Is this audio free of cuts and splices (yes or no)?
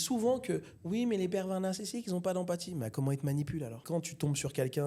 no